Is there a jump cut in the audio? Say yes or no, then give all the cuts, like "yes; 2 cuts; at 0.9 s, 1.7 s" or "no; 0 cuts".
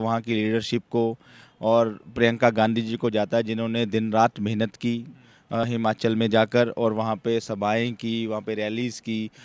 no; 0 cuts